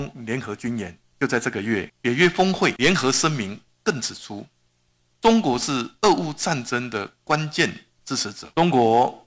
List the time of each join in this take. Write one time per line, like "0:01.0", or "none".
0:01.0
0:01.9
0:02.8
0:08.4